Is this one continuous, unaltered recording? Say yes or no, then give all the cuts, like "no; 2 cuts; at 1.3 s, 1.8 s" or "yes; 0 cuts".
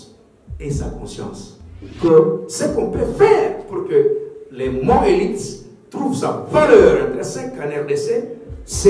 no; 1 cut; at 1.8 s